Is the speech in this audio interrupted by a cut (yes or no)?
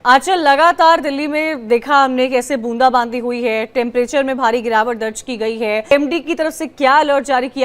yes